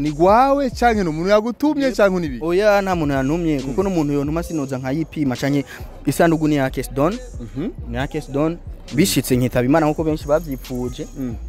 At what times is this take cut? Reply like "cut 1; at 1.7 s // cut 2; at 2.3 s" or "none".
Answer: none